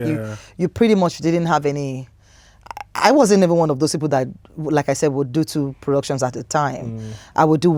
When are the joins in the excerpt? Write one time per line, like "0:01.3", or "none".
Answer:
none